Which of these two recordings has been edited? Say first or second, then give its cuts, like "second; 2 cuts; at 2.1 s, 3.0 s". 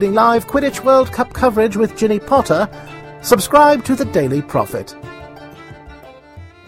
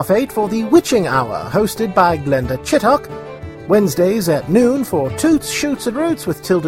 first; 1 cut; at 4.8 s